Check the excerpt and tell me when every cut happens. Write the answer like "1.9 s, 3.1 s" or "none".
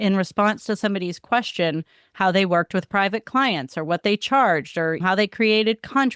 5.0 s